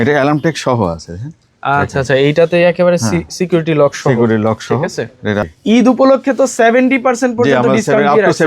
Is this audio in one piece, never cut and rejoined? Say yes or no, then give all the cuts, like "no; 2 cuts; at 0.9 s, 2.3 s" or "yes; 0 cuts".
no; 1 cut; at 5.4 s